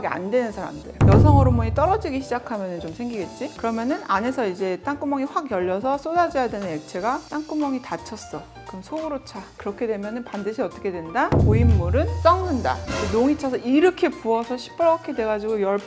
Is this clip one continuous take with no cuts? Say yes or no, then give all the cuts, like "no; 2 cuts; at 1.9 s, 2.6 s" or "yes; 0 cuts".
no; 2 cuts; at 3.5 s, 9.6 s